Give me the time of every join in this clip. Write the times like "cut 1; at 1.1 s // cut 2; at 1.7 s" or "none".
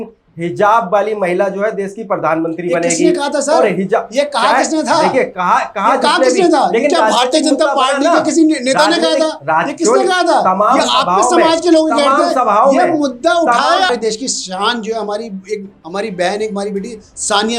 cut 1; at 13.9 s